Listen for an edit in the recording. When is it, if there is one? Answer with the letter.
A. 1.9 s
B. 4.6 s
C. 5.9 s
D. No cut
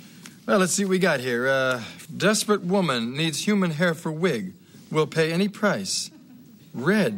A